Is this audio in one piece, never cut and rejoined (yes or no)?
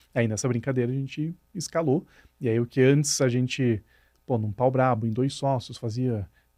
yes